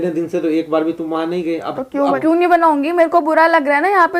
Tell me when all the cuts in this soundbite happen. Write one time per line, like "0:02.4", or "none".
0:02.2